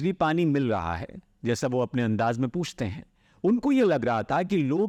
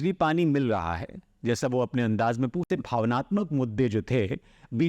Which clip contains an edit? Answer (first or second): second